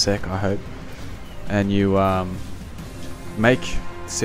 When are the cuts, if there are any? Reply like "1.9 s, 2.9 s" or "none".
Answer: 1.4 s